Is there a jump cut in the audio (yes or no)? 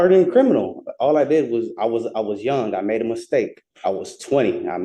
yes